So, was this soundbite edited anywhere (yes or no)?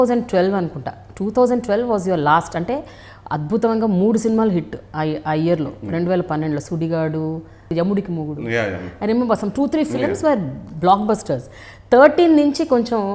no